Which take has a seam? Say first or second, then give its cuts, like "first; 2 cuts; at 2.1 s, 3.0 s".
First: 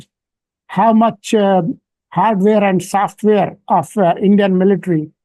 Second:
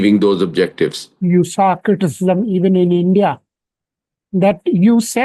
second; 1 cut; at 1.1 s